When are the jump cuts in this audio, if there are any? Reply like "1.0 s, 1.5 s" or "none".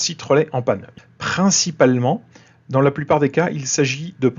0.9 s